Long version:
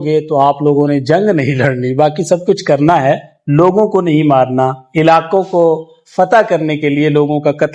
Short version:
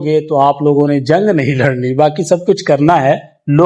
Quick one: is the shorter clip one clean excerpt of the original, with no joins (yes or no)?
yes